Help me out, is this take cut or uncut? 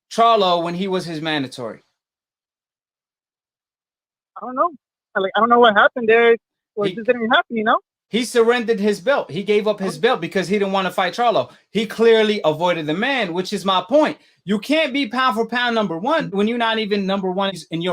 cut